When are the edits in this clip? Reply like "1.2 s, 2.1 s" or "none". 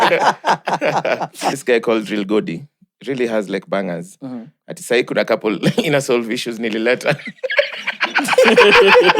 1.6 s